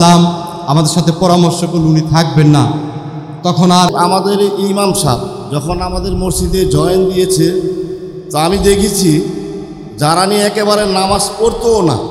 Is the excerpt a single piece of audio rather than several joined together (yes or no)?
no